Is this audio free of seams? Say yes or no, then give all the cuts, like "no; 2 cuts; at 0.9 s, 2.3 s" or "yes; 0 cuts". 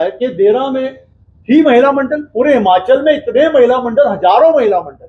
yes; 0 cuts